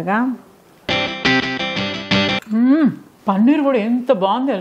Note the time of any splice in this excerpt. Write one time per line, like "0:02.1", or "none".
0:02.4
0:03.1